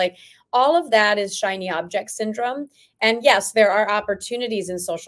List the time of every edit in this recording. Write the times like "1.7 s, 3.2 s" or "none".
none